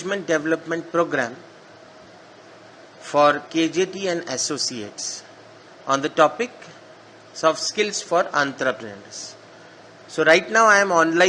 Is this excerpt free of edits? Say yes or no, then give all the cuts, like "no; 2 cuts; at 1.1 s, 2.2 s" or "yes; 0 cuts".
yes; 0 cuts